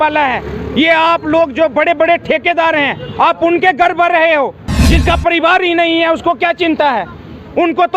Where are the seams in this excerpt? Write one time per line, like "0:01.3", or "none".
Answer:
0:04.7